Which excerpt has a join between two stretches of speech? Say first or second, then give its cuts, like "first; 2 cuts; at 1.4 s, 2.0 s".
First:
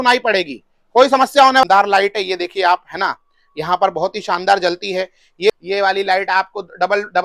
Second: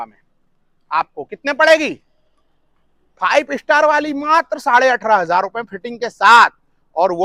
first; 2 cuts; at 1.6 s, 5.5 s